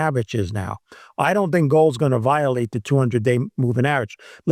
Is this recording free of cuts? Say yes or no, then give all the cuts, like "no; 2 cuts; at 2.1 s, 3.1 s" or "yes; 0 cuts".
yes; 0 cuts